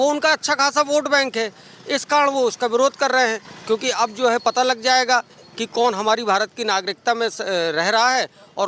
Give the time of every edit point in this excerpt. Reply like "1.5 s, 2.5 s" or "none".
none